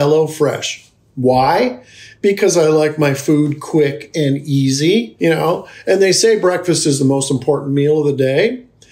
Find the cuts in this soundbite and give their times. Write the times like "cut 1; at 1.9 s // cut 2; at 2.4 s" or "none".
cut 1; at 5.1 s